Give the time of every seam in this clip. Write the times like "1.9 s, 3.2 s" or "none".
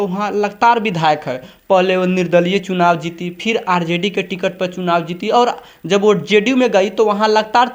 none